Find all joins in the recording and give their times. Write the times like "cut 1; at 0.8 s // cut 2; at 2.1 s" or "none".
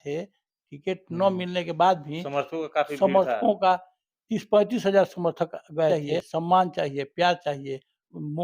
cut 1; at 5.9 s